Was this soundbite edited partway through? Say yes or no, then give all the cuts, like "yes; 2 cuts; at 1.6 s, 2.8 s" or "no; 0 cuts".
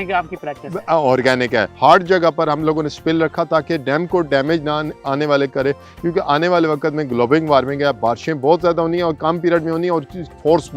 yes; 1 cut; at 1.7 s